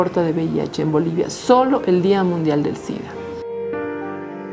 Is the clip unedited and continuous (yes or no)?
no